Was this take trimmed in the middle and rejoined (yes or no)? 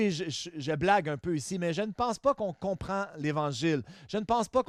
no